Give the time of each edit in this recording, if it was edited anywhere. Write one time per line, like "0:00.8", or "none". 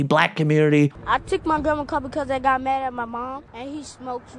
0:01.0
0:03.5